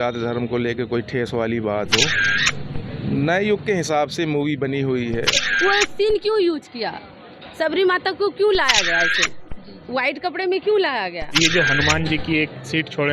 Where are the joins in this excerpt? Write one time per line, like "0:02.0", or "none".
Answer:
0:05.4
0:11.4